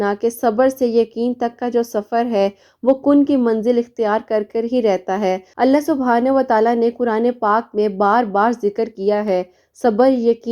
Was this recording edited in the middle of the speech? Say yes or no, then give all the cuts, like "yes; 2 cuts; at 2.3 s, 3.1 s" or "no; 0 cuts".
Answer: yes; 1 cut; at 5.6 s